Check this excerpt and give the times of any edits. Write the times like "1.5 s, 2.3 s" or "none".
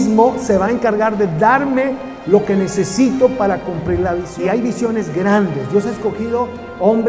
4.3 s